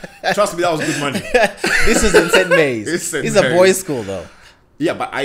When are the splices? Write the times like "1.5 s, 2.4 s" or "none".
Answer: none